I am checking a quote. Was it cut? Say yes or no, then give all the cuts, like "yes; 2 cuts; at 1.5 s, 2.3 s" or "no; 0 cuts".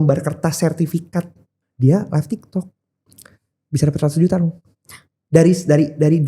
yes; 1 cut; at 1.4 s